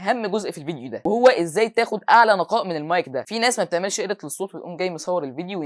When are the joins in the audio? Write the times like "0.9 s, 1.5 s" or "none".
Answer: 3.2 s